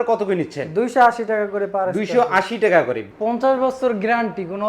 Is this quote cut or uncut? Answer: cut